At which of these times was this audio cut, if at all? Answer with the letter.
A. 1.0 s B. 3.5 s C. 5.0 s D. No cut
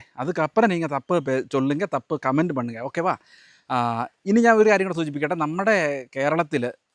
D